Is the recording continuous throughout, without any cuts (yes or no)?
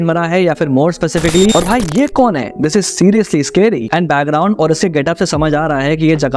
no